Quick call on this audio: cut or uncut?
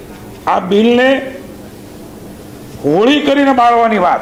uncut